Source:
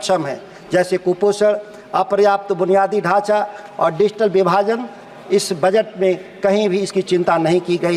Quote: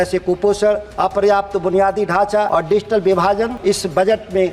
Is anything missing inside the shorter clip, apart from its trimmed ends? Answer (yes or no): yes